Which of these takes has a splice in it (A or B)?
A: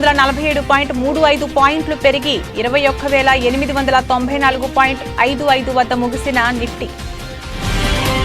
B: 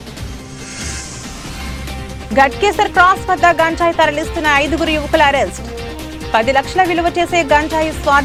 A